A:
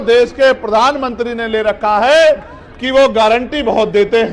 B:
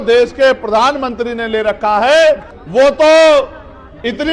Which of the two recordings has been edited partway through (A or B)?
B